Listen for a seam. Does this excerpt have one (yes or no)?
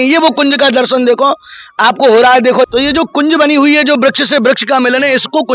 yes